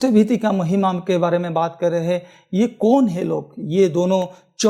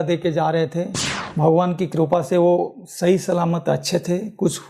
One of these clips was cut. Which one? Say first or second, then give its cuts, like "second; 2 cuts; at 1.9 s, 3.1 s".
second; 1 cut; at 1.2 s